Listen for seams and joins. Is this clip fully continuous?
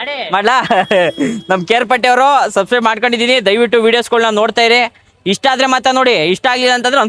yes; 0 cuts

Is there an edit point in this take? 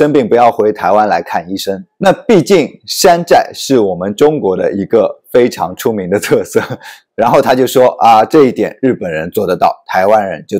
yes; 2 cuts; at 1.9 s, 7.0 s

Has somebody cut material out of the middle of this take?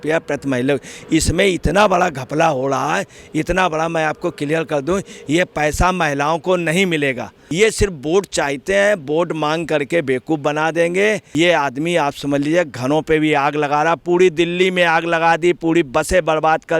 yes; 2 cuts; at 7.4 s, 11.3 s

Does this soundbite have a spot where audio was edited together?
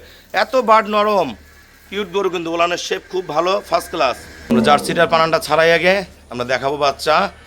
yes; 1 cut; at 4.5 s

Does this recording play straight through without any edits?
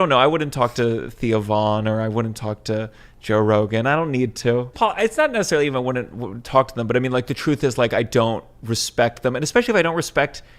no; 1 cut; at 4.7 s

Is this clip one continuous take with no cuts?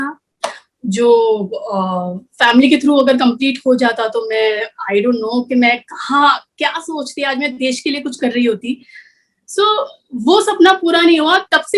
yes; 0 cuts

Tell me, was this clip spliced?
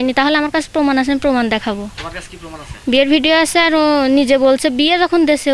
no; 0 cuts

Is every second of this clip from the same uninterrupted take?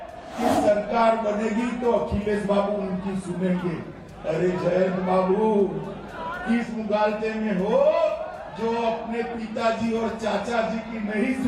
no; 1 cut; at 8.2 s

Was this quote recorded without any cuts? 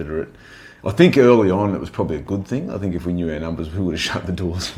yes; 0 cuts

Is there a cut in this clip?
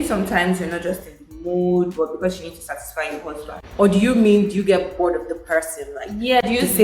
no; 0 cuts

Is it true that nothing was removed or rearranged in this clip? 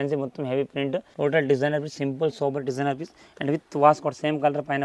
no; 1 cut; at 1.1 s

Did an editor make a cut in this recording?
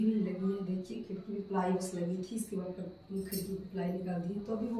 no; 0 cuts

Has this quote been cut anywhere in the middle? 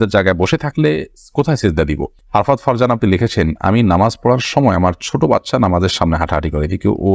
yes; 1 cut; at 2.2 s

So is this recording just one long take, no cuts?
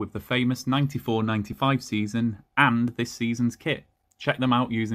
yes; 0 cuts

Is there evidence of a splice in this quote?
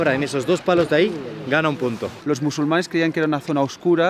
yes; 1 cut; at 2.2 s

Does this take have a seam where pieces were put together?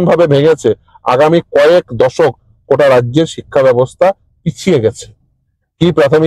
no; 0 cuts

